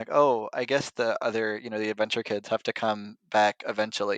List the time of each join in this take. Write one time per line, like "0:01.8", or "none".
none